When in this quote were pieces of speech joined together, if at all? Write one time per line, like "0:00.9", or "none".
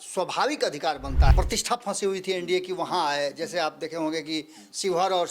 0:01.3